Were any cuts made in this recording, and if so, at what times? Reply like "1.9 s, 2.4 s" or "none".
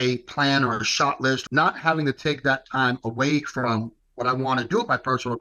1.4 s